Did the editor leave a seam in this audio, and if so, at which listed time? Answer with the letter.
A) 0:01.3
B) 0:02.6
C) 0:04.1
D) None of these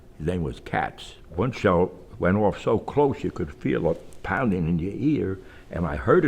A